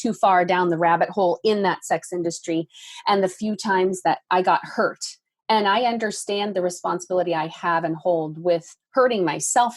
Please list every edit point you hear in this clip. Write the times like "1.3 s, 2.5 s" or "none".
4.2 s